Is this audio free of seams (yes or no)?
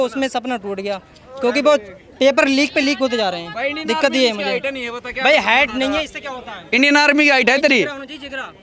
yes